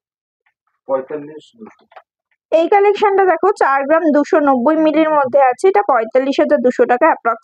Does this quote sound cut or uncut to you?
uncut